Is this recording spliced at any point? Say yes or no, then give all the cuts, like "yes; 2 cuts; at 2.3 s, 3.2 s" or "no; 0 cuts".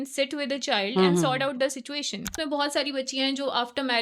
yes; 1 cut; at 2.4 s